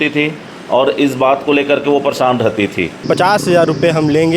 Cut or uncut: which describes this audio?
cut